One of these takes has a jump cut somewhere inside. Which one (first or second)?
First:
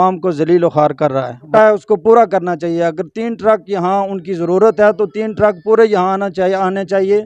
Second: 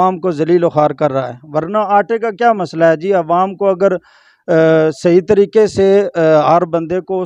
first